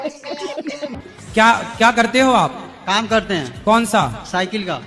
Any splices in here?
yes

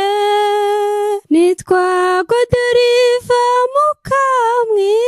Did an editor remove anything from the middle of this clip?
no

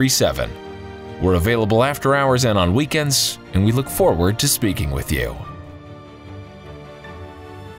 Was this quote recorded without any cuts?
no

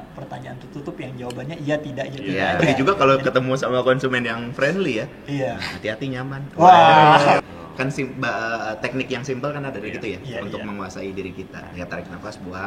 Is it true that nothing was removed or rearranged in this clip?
no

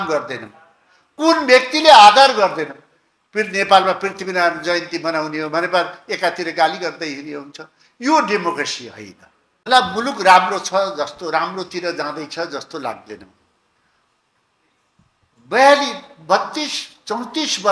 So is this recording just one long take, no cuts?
no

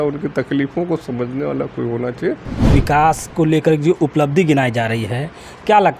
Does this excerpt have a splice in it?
yes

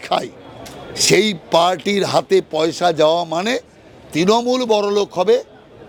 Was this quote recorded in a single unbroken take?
yes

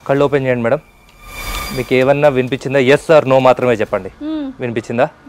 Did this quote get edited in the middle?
no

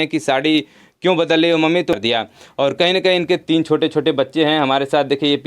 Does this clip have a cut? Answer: yes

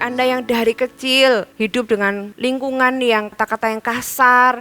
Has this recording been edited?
yes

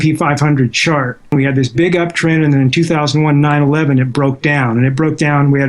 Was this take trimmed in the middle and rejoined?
yes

